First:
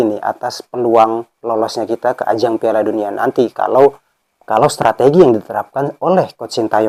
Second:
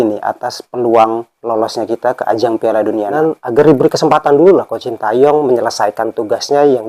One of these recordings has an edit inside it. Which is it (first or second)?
second